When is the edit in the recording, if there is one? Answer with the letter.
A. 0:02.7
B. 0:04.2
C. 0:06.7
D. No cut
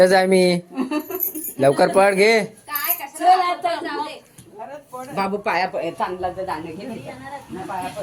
D